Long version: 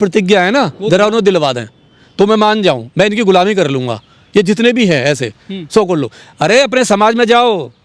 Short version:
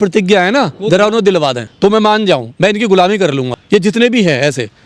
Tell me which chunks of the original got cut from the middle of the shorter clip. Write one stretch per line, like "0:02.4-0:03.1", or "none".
0:01.6-0:02.0
0:03.9-0:04.2